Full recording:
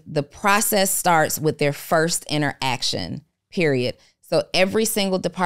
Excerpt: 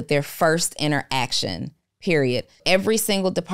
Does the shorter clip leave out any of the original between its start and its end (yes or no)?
yes